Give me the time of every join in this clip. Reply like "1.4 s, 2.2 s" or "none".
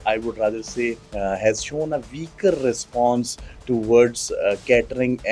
1.0 s